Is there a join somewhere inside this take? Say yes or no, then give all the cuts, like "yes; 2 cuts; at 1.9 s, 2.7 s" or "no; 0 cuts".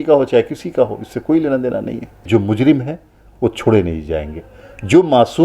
yes; 1 cut; at 2.3 s